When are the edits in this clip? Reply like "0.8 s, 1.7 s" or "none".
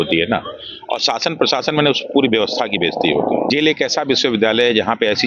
3.5 s

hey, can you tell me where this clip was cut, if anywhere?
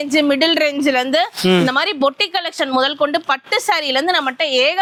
none

